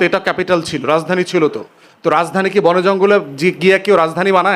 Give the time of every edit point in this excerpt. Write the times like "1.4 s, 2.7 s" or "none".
none